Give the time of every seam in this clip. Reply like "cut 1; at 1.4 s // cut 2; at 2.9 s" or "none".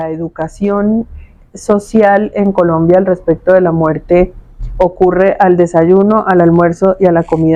none